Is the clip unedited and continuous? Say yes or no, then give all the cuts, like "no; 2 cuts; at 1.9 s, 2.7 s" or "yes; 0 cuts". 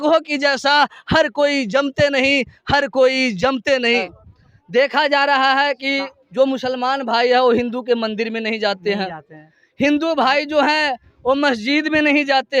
no; 1 cut; at 4.2 s